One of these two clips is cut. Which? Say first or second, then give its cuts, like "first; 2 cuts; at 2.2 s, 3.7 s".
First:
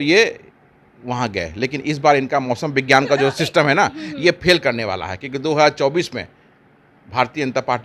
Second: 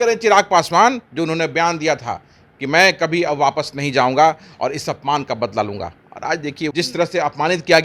second; 1 cut; at 6.7 s